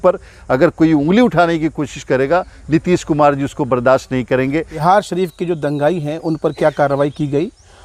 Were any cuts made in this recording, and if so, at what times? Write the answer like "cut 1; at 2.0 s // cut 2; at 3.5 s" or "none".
cut 1; at 4.8 s